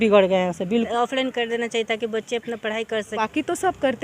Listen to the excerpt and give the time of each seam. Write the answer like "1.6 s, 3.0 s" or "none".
0.7 s, 3.1 s